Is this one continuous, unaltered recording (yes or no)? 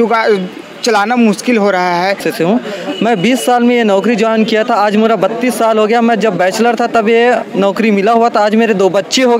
no